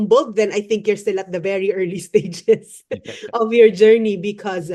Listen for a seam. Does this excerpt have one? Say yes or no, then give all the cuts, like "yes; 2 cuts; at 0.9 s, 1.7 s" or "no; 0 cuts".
no; 0 cuts